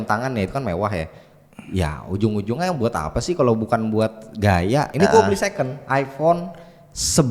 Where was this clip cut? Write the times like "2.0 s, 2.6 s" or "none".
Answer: 4.9 s

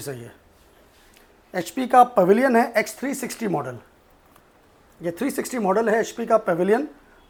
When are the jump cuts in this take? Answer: none

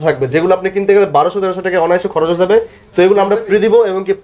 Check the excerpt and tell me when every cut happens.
none

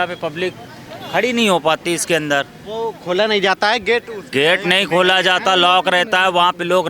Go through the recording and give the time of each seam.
none

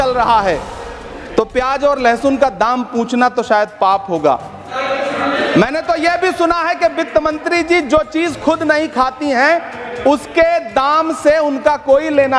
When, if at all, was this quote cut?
none

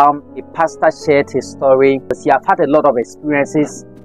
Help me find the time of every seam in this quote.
2.2 s

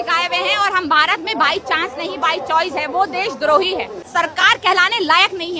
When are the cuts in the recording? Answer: 4.1 s

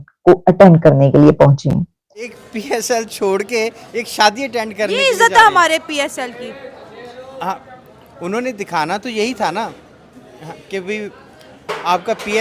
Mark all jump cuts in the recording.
2.4 s

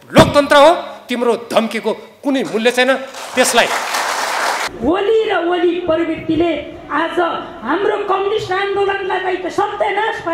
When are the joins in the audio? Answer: 4.6 s

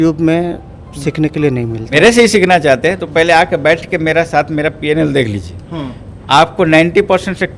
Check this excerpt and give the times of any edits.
2.0 s

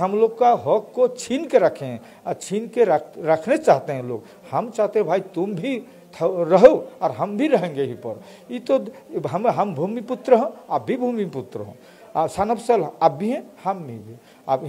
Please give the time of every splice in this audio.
none

